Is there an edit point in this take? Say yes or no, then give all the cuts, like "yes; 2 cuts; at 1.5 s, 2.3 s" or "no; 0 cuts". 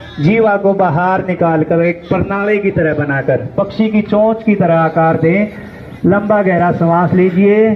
no; 0 cuts